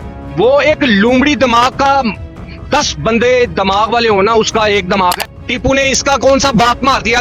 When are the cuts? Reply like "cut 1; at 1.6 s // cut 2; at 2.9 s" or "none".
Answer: cut 1; at 5.3 s